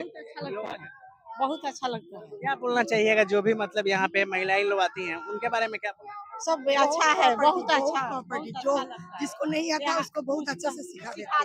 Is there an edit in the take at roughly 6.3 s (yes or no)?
no